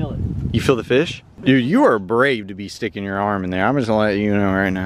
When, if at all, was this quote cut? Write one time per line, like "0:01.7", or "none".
0:01.3